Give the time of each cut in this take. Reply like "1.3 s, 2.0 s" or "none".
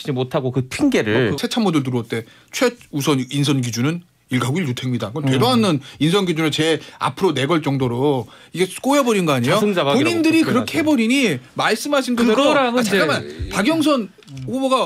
1.4 s